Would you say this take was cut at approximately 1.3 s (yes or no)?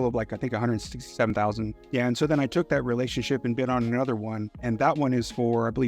yes